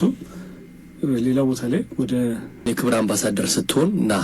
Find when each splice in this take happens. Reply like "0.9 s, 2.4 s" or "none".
2.7 s